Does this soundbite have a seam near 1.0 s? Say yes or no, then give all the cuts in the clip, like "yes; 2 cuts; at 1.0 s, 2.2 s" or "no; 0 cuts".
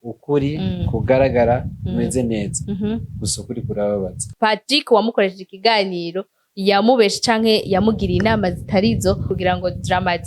no; 2 cuts; at 4.2 s, 9.3 s